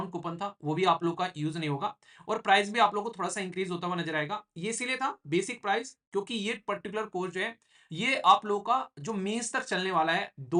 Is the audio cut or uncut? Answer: uncut